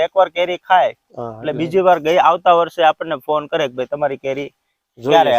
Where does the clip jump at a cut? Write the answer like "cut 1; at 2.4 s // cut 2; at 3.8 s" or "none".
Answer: none